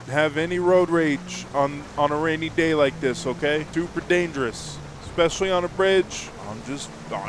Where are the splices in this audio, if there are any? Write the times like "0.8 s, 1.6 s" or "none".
1.8 s, 3.7 s